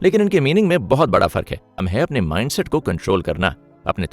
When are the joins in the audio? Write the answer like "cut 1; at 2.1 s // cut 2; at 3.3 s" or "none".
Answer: cut 1; at 1.8 s